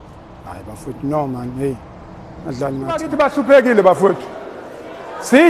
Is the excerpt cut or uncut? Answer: cut